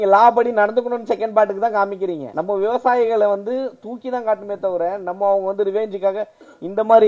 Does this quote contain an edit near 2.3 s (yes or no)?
yes